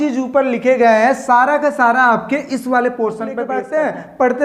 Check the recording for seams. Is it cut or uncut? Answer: cut